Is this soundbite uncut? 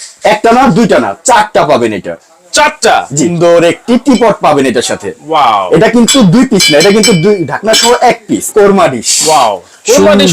no; 2 cuts; at 3.3 s, 8.4 s

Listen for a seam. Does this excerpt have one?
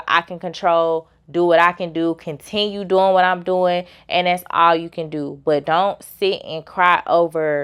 no; 0 cuts

